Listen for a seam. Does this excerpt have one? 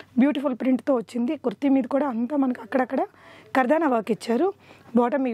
no; 0 cuts

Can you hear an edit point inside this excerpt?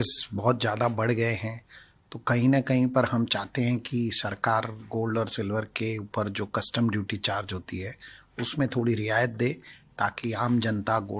no; 0 cuts

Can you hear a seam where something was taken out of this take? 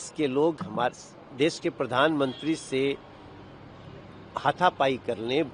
no; 0 cuts

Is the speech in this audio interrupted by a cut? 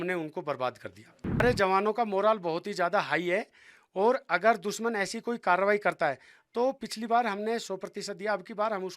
yes; 1 cut; at 1.4 s

